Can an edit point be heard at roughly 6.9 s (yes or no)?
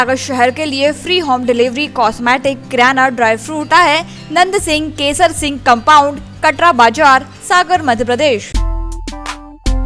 no